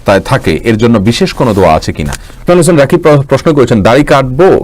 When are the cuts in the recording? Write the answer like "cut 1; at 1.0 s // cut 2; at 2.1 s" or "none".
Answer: cut 1; at 2.4 s